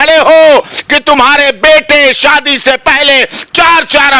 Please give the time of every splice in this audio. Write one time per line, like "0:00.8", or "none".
none